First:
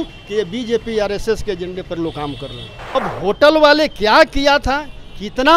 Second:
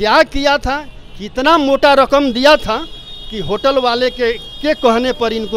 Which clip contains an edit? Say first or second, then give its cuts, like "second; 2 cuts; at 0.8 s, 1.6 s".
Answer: first; 1 cut; at 2.7 s